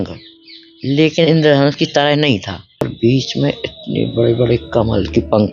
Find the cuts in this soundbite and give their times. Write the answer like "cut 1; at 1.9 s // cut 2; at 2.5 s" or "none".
cut 1; at 2.9 s

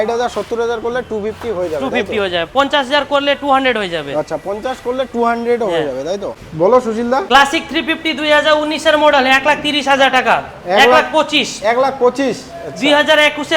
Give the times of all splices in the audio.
cut 1; at 6.4 s // cut 2; at 7.2 s

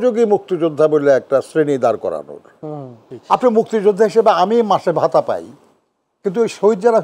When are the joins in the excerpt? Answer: cut 1; at 3.1 s

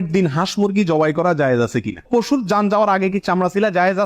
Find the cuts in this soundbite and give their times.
cut 1; at 2.0 s

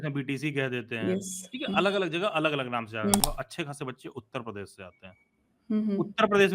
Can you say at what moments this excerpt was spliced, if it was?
cut 1; at 3.2 s

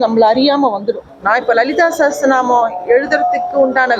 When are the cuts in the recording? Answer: cut 1; at 1.1 s

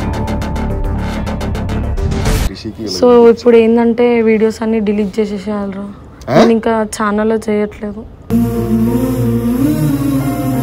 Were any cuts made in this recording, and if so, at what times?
cut 1; at 2.5 s

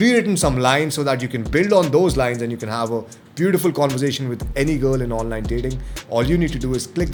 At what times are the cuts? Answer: none

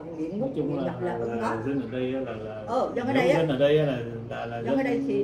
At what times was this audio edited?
none

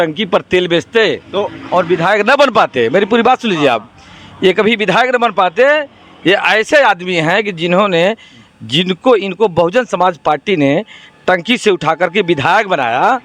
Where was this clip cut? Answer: none

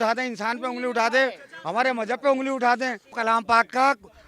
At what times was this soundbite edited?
cut 1; at 3.1 s

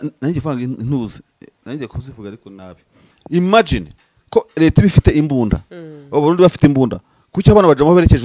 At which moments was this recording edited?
cut 1; at 3.1 s

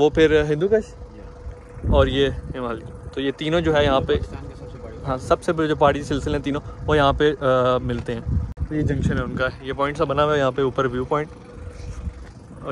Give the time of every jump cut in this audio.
none

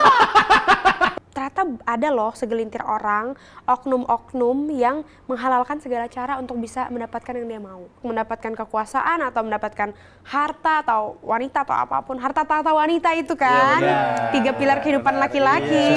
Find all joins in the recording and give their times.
cut 1; at 1.1 s // cut 2; at 8.0 s

